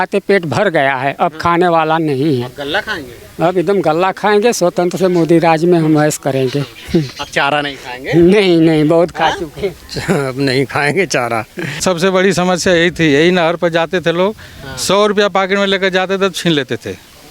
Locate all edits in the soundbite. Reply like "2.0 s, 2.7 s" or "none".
11.8 s